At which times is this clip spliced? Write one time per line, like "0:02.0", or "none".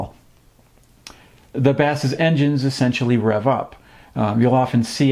0:02.7